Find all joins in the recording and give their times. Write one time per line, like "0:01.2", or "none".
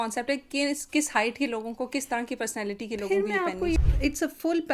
0:03.8